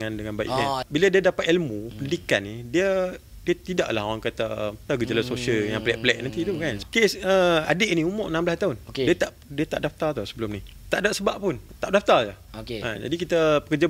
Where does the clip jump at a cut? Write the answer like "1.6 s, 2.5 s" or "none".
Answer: 0.8 s, 4.9 s, 6.8 s, 10.7 s, 11.7 s